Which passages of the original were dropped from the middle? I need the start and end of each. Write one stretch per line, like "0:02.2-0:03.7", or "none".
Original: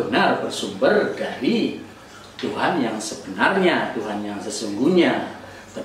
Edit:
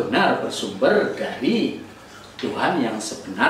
none